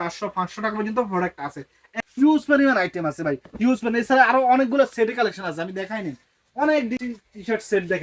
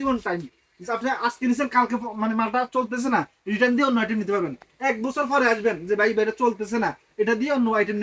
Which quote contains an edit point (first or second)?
first